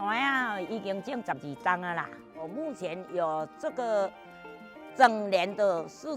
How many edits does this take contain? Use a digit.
0